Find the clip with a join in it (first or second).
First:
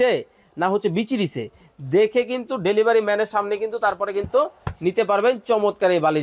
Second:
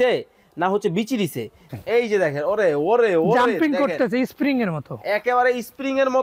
second